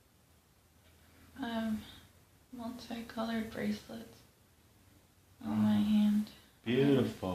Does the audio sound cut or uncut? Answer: uncut